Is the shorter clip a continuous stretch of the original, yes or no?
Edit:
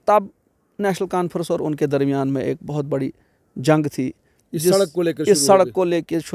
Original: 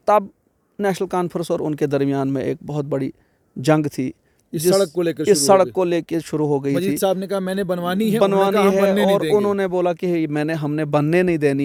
yes